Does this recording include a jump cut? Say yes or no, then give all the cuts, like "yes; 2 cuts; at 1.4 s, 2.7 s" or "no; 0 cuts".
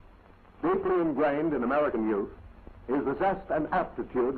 no; 0 cuts